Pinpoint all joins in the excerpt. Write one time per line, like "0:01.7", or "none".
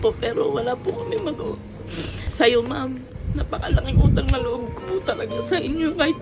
0:02.2